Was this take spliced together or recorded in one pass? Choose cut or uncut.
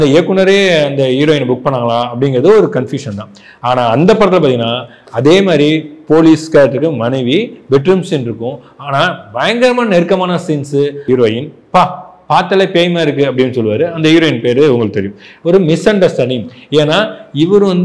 cut